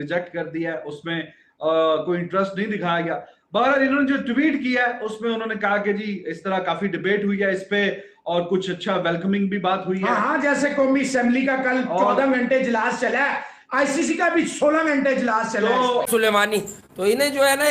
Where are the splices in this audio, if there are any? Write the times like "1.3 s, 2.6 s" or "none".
16.1 s